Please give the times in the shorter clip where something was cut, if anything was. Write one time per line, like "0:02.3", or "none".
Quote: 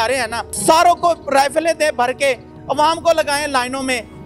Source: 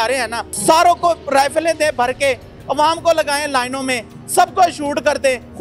none